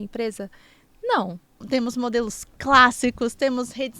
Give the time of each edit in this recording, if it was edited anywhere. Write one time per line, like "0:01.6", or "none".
0:01.6